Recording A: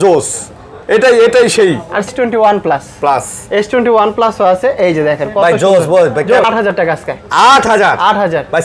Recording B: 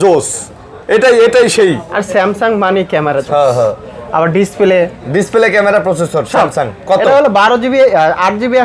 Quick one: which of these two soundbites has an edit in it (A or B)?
A